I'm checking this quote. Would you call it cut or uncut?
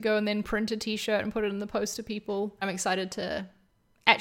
cut